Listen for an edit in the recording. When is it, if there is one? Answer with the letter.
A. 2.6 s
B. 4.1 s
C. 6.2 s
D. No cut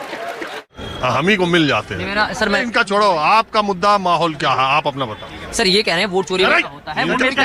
A